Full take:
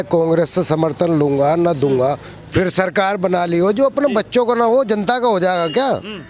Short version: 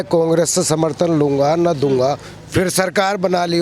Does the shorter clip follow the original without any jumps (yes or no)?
yes